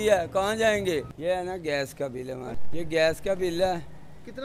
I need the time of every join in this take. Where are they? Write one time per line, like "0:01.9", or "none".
0:01.1
0:02.6